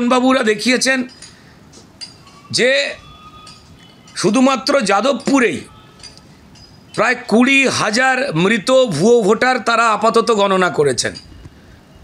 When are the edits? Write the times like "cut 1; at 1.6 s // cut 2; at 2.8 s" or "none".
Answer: none